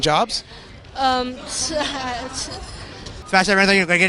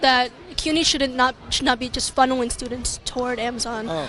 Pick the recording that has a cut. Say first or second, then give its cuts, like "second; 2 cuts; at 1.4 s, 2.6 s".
first; 1 cut; at 3.1 s